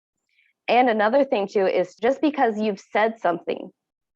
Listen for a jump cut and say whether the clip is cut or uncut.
cut